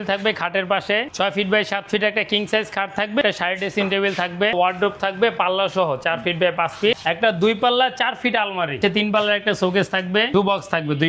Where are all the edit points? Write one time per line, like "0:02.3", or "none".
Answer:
0:01.1
0:03.2
0:04.5
0:07.0
0:08.8
0:10.3